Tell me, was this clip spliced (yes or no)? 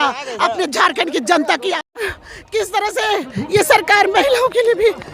yes